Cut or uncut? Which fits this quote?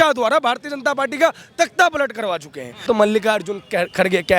cut